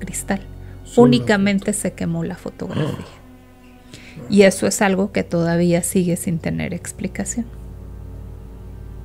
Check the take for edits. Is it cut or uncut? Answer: uncut